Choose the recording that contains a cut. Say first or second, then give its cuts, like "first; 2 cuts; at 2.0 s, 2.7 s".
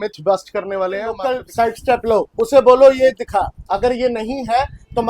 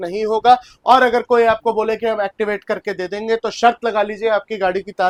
first; 1 cut; at 1.2 s